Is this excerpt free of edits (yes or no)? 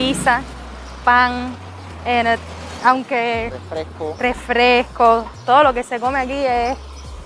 yes